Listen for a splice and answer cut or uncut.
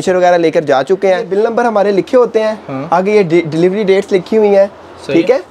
cut